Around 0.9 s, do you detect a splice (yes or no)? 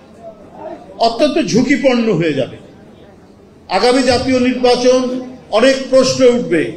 no